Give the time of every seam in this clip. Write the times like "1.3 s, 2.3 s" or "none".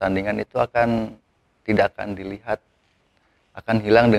none